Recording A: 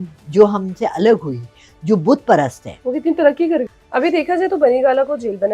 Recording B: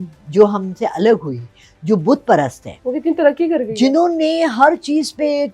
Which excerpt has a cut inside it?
A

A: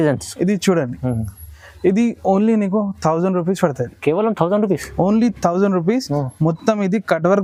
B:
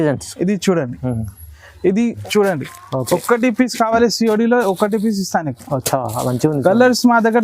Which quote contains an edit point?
B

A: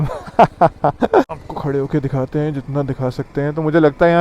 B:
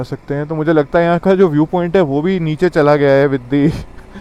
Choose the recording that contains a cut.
A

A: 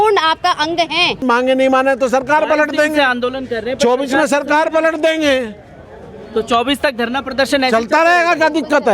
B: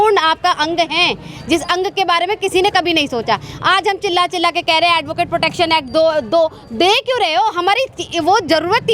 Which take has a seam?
A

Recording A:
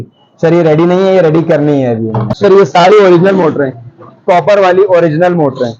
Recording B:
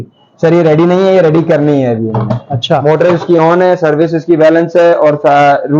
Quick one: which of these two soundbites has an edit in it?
A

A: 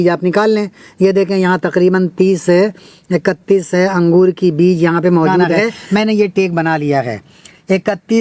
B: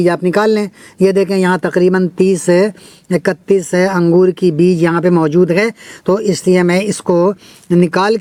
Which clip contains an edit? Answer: A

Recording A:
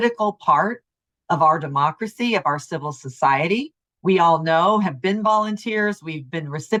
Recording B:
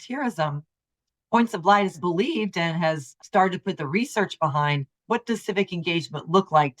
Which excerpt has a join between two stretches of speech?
B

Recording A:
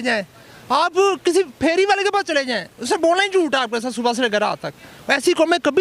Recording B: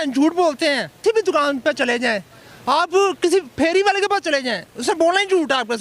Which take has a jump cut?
B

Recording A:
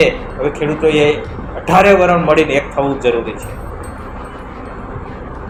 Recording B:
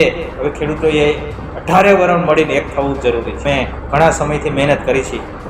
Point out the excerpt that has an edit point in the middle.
B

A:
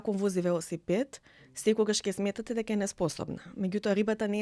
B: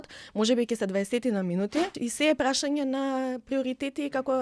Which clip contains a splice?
B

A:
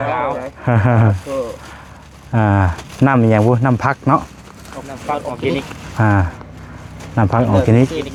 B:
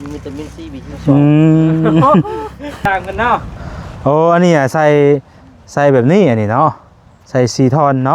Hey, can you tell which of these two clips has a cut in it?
B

